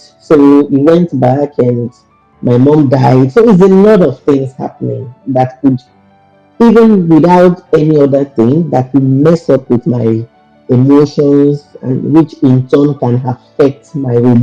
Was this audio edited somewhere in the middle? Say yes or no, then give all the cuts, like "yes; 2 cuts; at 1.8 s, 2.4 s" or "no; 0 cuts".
no; 0 cuts